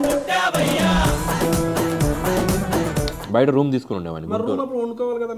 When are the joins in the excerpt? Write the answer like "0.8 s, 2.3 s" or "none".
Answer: 3.2 s